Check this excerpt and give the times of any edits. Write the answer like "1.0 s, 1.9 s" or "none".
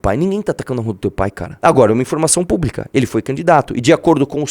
1.4 s